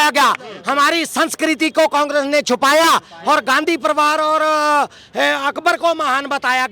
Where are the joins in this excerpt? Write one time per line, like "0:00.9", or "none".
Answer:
none